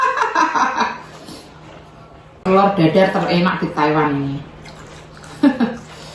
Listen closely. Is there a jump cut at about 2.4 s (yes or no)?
yes